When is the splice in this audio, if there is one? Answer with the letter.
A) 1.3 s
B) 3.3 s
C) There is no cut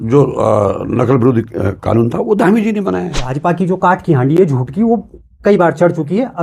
B